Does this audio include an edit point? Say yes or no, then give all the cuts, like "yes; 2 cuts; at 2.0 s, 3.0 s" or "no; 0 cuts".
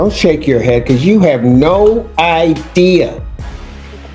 no; 0 cuts